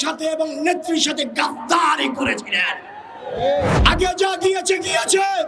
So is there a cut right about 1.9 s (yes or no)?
no